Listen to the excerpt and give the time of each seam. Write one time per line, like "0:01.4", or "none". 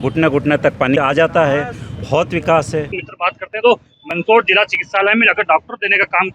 0:01.0
0:03.0